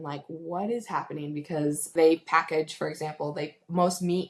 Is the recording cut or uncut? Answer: cut